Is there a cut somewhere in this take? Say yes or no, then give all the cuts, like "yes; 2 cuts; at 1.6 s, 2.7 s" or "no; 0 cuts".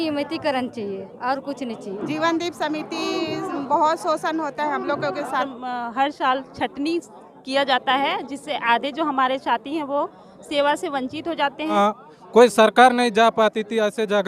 yes; 3 cuts; at 2.0 s, 5.5 s, 11.7 s